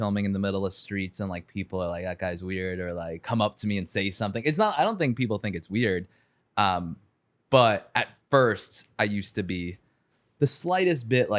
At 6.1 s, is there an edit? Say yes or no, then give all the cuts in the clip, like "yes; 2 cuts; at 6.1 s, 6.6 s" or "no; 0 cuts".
no; 0 cuts